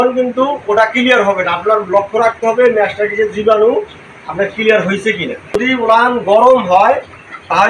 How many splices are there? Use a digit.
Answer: 1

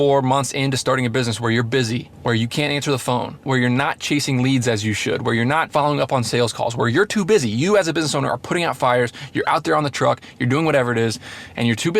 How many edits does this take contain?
3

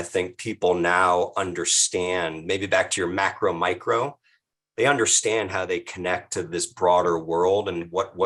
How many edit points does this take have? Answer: 0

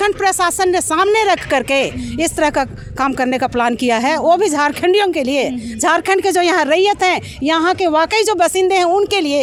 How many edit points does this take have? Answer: 0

